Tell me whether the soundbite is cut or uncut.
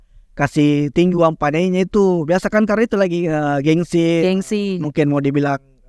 uncut